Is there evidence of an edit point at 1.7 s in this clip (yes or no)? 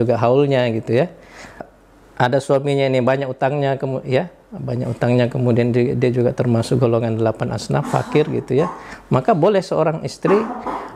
yes